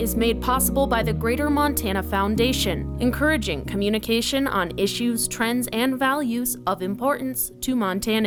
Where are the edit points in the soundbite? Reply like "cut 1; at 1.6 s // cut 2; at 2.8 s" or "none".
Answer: none